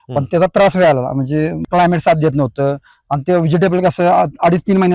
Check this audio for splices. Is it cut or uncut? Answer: cut